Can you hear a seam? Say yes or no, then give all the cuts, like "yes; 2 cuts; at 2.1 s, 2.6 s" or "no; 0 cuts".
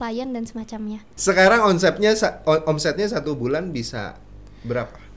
yes; 1 cut; at 1.1 s